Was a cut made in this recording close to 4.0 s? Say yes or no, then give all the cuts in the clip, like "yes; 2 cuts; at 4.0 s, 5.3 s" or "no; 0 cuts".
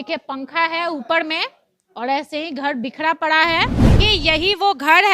yes; 1 cut; at 4.0 s